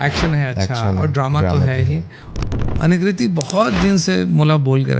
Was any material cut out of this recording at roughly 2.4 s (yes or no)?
yes